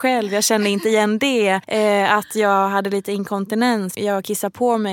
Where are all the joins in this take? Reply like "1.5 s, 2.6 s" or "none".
1.7 s, 3.9 s